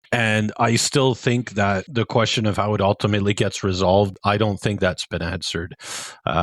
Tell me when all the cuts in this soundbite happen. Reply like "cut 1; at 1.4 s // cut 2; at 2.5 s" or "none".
cut 1; at 4.1 s

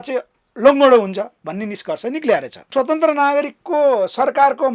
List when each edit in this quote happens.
cut 1; at 2.7 s

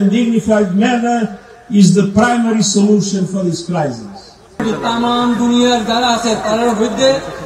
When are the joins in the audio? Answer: cut 1; at 4.6 s

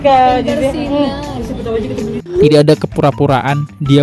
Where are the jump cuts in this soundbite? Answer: cut 1; at 2.2 s

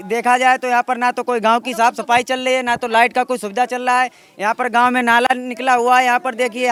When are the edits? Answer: none

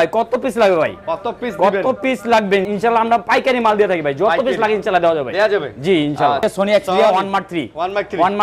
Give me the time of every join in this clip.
cut 1; at 2.7 s // cut 2; at 6.4 s

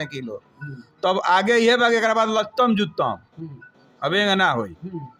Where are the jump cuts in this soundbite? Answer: none

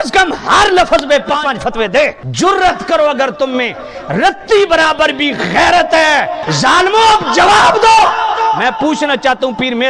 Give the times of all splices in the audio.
cut 1; at 2.2 s // cut 2; at 6.4 s

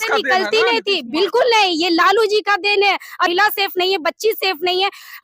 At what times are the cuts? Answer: cut 1; at 3.3 s

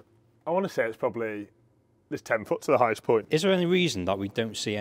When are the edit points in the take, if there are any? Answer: cut 1; at 3.2 s

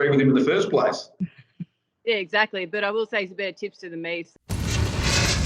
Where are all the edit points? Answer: cut 1; at 4.5 s

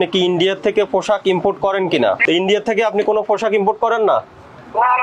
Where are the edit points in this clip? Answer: none

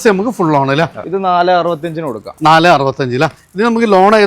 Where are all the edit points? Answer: cut 1; at 1.1 s

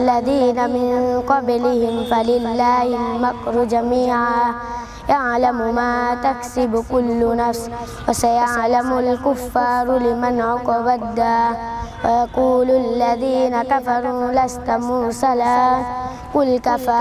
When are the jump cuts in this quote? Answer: none

